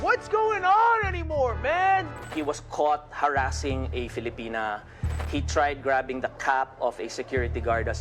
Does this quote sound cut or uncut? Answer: cut